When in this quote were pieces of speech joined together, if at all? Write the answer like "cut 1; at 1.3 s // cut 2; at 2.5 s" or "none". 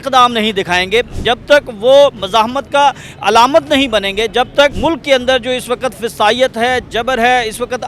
cut 1; at 4.8 s